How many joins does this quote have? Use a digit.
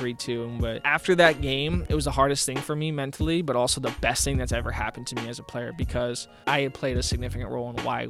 3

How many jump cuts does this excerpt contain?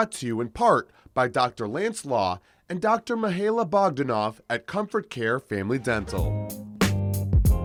0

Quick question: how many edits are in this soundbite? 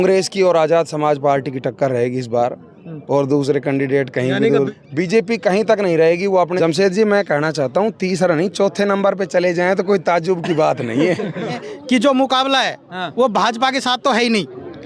3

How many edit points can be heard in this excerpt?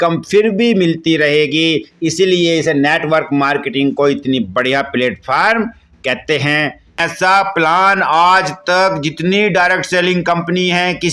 1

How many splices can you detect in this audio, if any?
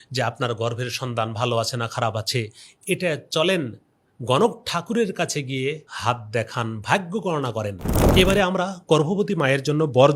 2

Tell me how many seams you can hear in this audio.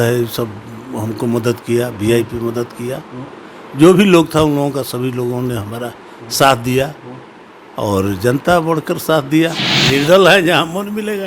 1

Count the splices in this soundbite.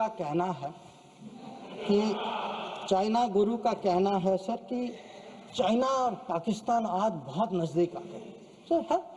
0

